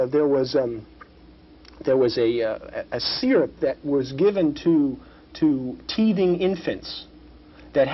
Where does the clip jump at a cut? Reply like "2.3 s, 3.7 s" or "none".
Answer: none